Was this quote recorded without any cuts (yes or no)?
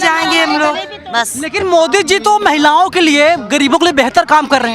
no